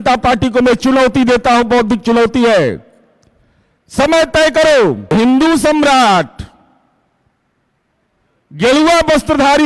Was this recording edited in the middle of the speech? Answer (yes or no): yes